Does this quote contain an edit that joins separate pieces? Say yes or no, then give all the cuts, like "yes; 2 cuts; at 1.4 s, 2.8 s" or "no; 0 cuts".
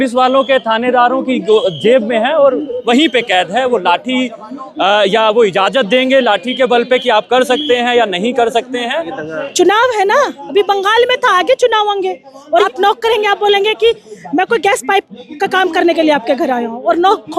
yes; 2 cuts; at 9.2 s, 12.7 s